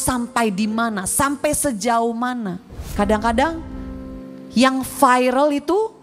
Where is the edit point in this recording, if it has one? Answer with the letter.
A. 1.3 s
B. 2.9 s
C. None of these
B